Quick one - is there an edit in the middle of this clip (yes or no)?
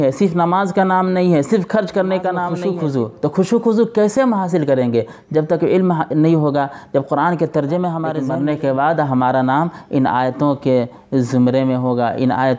yes